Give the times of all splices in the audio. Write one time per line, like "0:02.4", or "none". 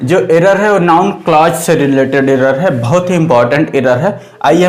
none